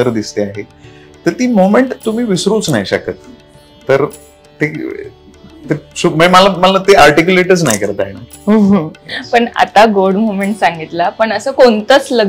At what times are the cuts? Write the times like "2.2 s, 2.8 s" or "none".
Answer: none